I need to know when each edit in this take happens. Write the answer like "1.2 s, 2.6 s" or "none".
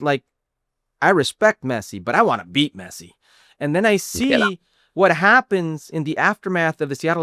none